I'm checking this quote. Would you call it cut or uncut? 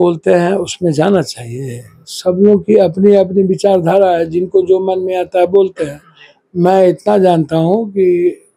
uncut